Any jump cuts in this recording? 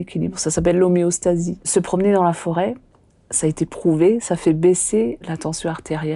yes; 2 cuts; at 1.7 s, 5.2 s

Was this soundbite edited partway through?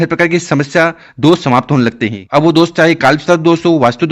yes; 1 cut; at 2.1 s

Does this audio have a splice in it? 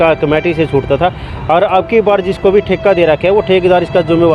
no; 0 cuts

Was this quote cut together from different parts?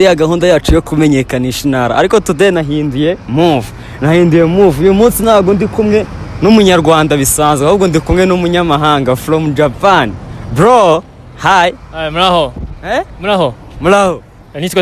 no; 0 cuts

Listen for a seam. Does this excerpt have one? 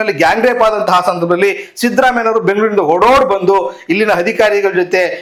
no; 0 cuts

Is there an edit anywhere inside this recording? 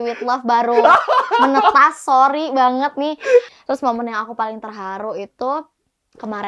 yes; 1 cut; at 3.5 s

